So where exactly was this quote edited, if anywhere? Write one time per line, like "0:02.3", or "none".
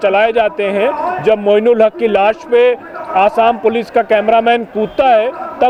none